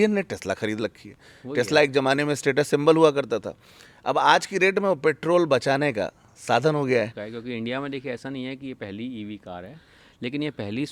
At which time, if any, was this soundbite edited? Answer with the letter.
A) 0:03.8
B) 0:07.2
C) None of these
B